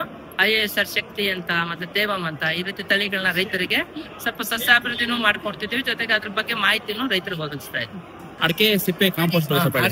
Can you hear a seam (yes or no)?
no